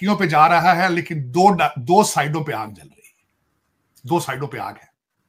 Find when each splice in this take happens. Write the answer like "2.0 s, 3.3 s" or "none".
none